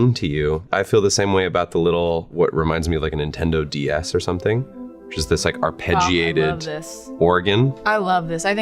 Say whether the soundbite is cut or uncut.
cut